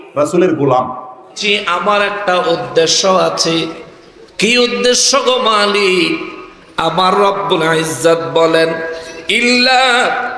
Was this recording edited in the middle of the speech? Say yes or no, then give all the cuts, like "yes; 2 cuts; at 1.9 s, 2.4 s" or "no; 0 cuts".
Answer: yes; 1 cut; at 1.4 s